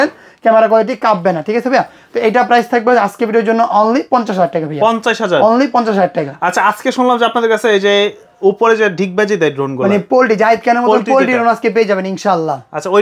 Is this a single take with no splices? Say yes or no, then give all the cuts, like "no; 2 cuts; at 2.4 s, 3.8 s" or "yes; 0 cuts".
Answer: yes; 0 cuts